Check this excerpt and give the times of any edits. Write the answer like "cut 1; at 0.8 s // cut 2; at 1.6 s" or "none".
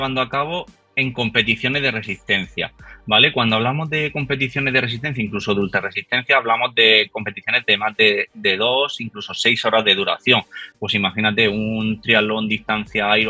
none